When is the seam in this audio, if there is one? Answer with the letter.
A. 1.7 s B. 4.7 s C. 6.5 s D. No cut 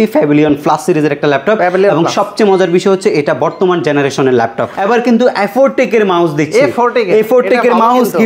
B